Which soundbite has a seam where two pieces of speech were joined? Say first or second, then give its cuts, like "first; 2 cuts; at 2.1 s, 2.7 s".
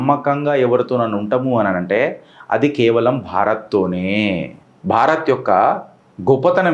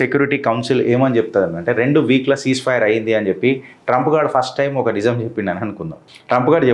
first; 1 cut; at 4.6 s